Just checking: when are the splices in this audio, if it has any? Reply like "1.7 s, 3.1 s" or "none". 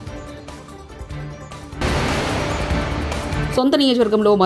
1.8 s, 3.4 s

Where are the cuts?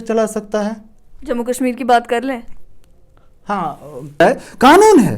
4.2 s

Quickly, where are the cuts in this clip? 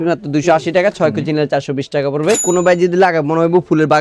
2.4 s

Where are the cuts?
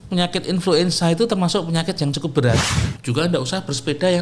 2.7 s

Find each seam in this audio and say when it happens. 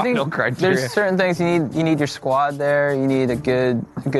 none

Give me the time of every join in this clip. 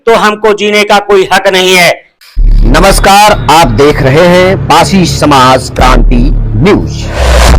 2.1 s

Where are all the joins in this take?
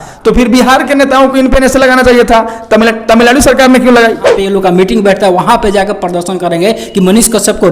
4.4 s

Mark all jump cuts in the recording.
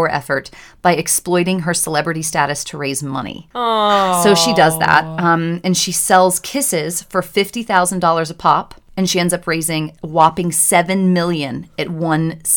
none

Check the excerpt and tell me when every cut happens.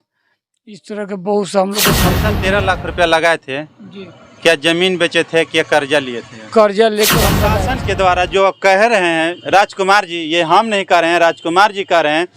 2.3 s, 7.6 s

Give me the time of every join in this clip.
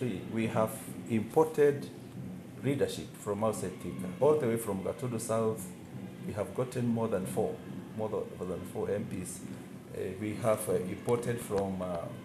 none

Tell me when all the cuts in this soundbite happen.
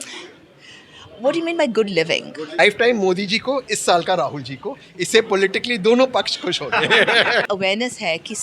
2.5 s, 7.5 s

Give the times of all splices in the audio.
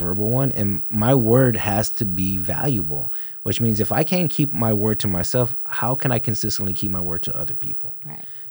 none

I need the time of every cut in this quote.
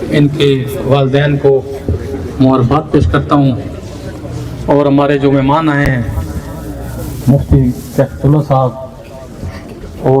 none

